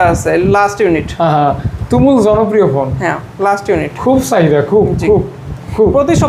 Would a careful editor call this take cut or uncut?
uncut